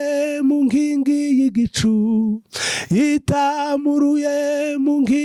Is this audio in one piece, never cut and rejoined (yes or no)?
yes